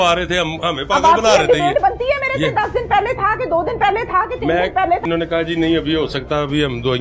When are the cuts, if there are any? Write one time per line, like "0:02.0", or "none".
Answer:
0:05.0